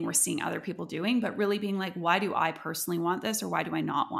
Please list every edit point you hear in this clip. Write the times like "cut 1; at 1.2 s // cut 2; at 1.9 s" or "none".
none